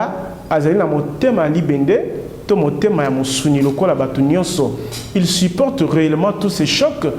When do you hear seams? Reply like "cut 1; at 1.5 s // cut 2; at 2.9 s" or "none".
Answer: none